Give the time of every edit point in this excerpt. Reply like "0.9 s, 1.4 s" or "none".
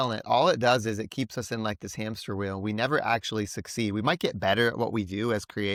none